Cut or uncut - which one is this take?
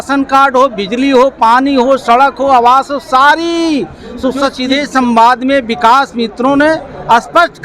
cut